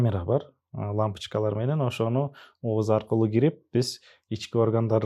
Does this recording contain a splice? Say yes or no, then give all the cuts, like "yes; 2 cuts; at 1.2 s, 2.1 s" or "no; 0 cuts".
no; 0 cuts